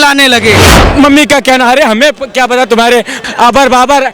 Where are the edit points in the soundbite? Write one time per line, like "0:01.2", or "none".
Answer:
0:00.8
0:03.2